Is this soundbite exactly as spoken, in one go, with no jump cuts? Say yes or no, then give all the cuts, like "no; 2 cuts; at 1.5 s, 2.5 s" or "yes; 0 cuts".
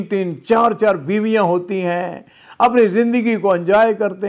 yes; 0 cuts